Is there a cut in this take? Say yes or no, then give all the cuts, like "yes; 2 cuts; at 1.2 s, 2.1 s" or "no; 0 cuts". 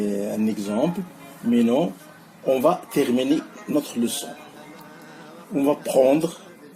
no; 0 cuts